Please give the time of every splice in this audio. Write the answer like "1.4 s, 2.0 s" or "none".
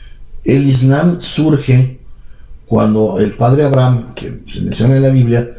3.2 s